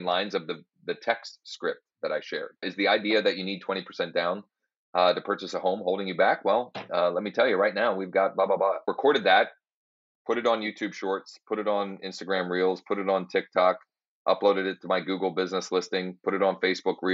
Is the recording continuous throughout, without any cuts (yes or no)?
no